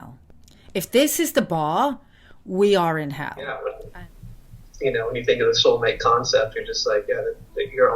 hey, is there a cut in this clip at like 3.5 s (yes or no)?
yes